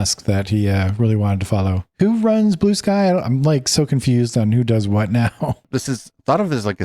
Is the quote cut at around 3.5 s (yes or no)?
no